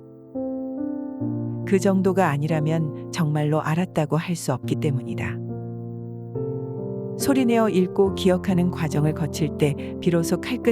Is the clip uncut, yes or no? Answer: no